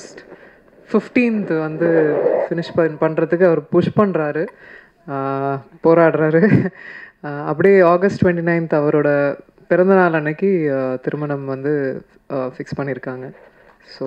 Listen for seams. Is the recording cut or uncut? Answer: uncut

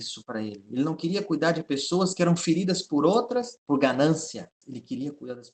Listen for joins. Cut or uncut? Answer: cut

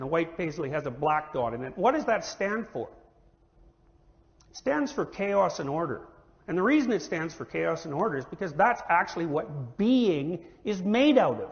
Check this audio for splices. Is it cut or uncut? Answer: uncut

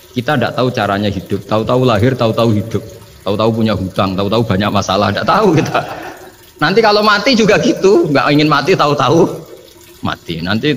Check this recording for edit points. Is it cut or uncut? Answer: uncut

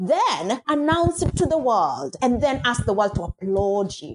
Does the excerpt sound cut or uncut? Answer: uncut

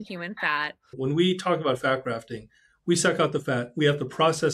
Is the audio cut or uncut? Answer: cut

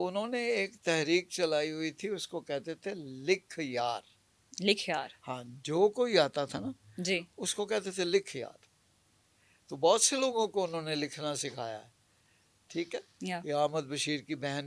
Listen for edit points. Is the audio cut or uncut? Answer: uncut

